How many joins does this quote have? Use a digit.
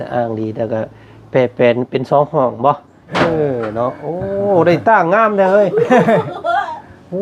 1